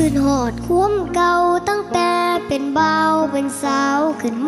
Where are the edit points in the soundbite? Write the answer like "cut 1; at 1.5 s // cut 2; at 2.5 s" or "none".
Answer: none

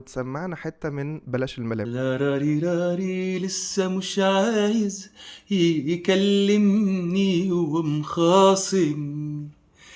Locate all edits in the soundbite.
cut 1; at 1.8 s

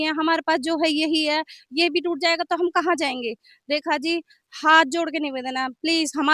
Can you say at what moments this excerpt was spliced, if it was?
none

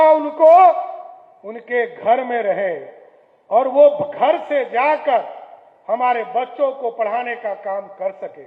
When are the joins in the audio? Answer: none

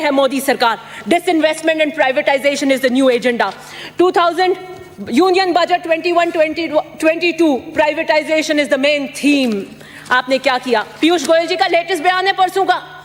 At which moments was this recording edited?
none

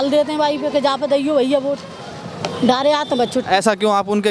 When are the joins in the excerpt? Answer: none

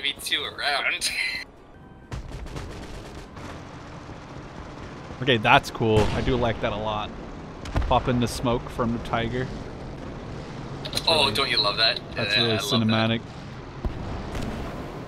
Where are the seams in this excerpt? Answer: cut 1; at 1.7 s

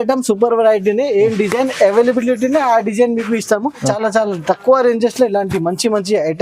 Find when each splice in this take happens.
cut 1; at 3.9 s

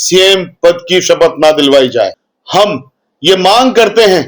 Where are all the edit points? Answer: cut 1; at 2.3 s

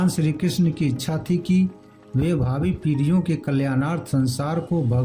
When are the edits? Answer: none

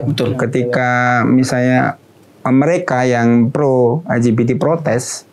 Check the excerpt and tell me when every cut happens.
none

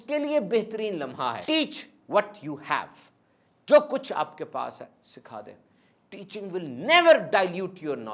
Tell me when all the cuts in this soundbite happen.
cut 1; at 1.4 s

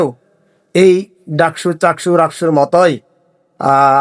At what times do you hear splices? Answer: none

